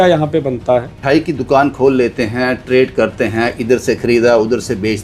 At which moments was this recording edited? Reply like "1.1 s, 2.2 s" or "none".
1.0 s